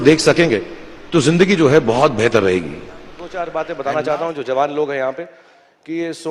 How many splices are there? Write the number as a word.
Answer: one